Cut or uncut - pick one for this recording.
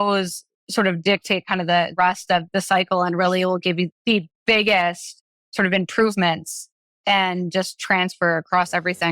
cut